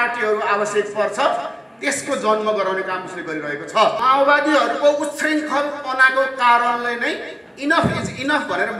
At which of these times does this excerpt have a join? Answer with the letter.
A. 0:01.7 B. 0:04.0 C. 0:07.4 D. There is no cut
B